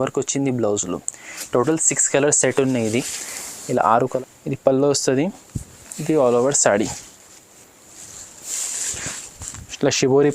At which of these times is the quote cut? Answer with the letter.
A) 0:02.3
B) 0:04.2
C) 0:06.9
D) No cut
B